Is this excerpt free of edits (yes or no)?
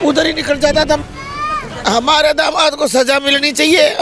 no